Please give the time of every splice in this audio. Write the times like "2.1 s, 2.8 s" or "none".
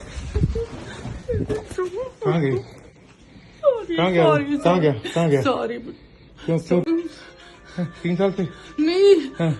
6.8 s